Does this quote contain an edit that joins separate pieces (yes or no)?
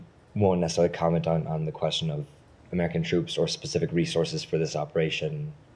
no